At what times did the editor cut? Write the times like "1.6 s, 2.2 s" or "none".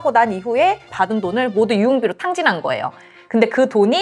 0.9 s